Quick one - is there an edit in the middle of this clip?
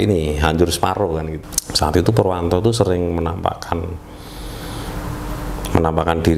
yes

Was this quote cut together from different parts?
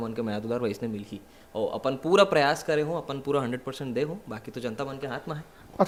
no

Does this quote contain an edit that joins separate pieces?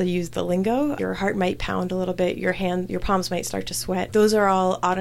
yes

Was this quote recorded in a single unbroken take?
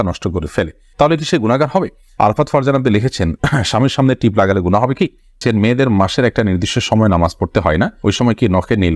no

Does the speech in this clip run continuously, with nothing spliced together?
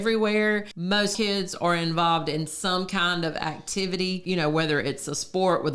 no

